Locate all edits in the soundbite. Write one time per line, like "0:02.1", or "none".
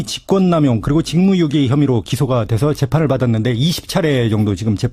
none